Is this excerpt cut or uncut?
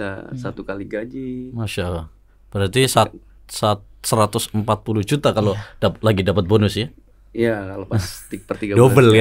uncut